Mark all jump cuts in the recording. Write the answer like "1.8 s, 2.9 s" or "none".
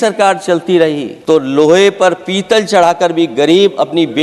1.1 s